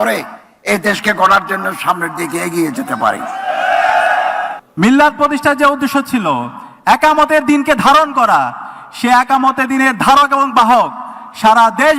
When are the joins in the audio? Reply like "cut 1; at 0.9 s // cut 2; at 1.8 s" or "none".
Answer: cut 1; at 4.6 s